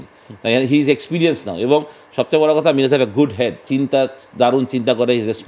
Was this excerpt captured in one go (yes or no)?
no